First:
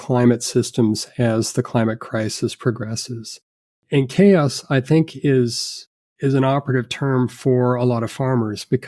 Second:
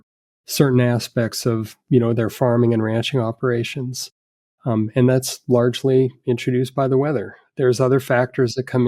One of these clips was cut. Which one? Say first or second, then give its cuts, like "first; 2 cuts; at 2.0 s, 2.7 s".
first; 1 cut; at 3.8 s